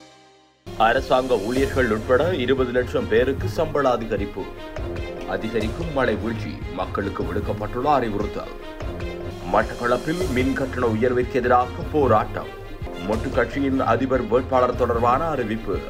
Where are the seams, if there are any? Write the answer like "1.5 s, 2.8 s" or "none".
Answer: none